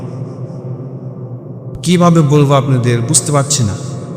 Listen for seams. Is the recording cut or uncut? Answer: cut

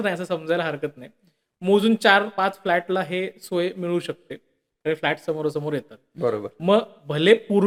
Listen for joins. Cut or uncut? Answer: uncut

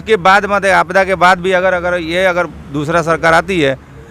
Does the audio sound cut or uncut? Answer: uncut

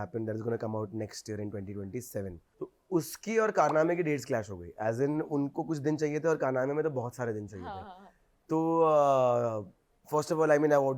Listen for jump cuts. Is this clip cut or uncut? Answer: cut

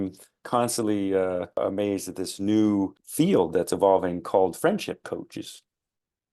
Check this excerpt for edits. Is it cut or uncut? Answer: cut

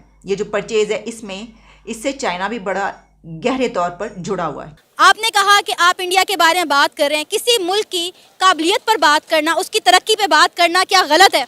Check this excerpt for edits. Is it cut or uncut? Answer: cut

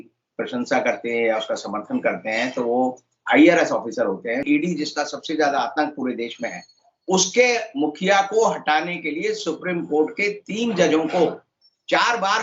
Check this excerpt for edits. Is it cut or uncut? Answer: cut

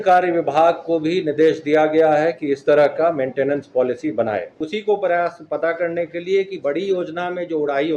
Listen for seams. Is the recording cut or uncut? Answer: cut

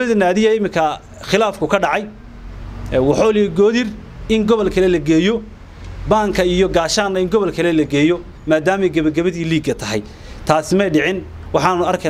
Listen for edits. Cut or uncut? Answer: uncut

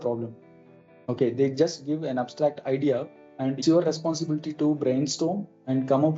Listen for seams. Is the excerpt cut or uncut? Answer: cut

